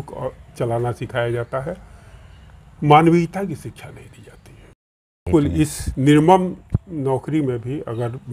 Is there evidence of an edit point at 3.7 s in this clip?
no; 1 cut; at 5.3 s

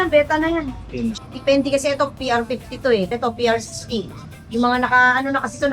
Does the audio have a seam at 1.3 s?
yes; 2 cuts; at 1.3 s, 3.1 s

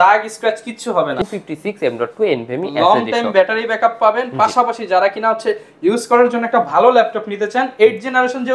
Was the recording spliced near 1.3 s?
yes; 1 cut; at 1.3 s

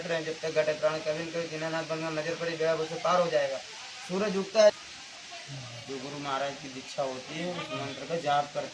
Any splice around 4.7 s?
yes; 1 cut; at 4.7 s

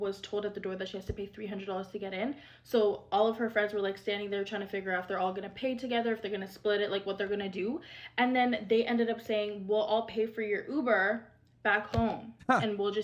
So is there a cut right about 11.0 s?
no; 2 cuts; at 2.4 s, 8.6 s

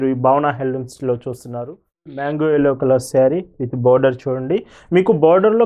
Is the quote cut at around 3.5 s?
no; 1 cut; at 2.2 s

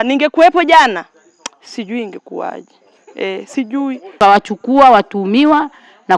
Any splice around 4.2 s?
yes; 1 cut; at 4.2 s

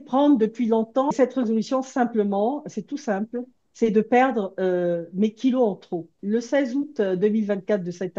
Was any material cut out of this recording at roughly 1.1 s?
yes; 2 cuts; at 1.1 s, 6.2 s

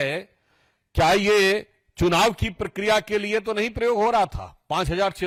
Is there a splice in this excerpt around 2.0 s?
no; 0 cuts

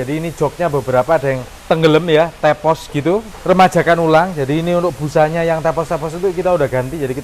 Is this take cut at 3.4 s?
yes; 2 cuts; at 1.5 s, 3.4 s

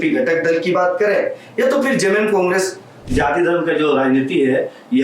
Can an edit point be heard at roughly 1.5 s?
no; 1 cut; at 2.9 s

